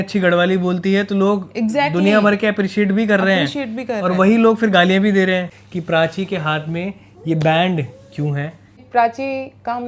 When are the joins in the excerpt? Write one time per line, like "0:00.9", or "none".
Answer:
0:05.6
0:08.8